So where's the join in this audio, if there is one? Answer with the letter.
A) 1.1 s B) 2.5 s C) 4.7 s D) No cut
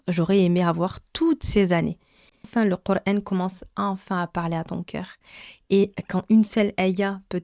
B